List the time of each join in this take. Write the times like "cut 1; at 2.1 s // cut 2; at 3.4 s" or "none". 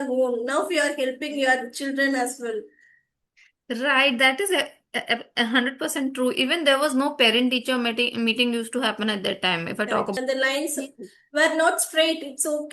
cut 1; at 10.2 s

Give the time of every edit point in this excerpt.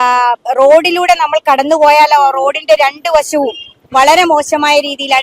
none

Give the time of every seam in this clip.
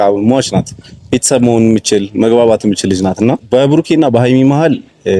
cut 1; at 3.4 s

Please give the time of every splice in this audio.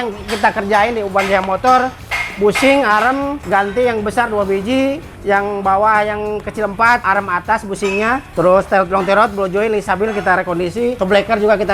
cut 1; at 3.4 s // cut 2; at 7.0 s // cut 3; at 11.0 s

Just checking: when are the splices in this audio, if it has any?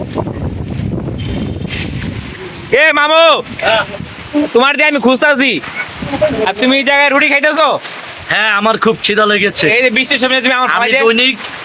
none

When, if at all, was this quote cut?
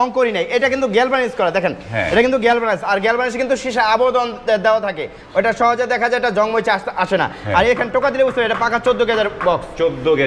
none

